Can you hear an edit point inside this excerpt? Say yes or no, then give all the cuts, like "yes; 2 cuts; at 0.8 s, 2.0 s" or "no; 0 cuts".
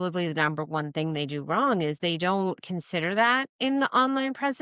no; 0 cuts